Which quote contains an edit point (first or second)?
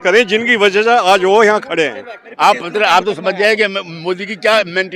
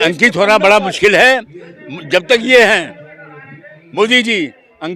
first